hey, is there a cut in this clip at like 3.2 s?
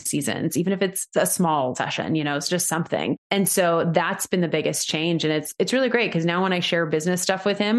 yes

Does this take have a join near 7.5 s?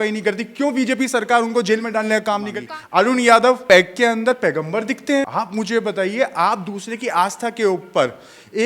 no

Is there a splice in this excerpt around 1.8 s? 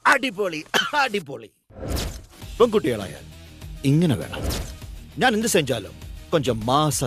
no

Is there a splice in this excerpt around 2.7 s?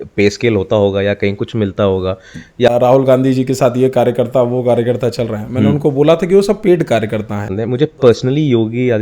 yes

